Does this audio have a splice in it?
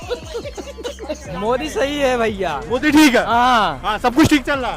yes; 1 cut; at 1.2 s

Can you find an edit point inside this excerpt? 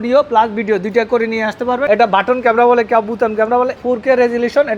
yes; 2 cuts; at 1.8 s, 3.8 s

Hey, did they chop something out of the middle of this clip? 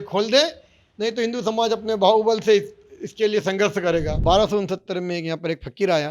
yes; 1 cut; at 4.1 s

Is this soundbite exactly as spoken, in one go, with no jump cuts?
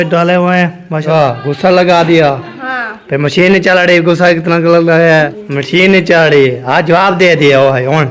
no; 2 cuts; at 1.0 s, 5.4 s

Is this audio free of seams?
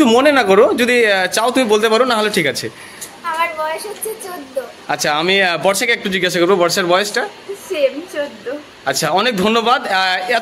yes; 0 cuts

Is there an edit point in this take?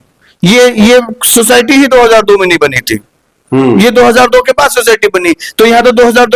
no; 0 cuts

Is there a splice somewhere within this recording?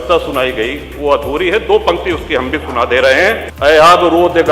yes; 1 cut; at 3.5 s

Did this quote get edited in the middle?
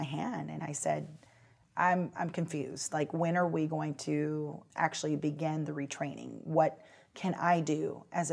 yes; 1 cut; at 4.6 s

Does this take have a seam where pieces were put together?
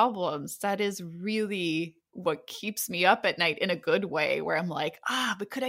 no; 0 cuts

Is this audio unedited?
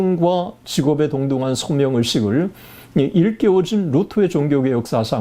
yes; 0 cuts

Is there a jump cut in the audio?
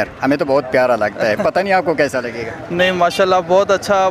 no; 0 cuts

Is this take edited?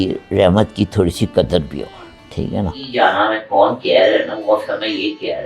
yes; 1 cut; at 2.9 s

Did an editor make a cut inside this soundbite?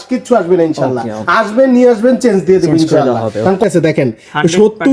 yes; 1 cut; at 3.6 s

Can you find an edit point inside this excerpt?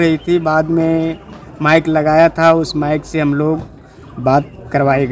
no; 0 cuts

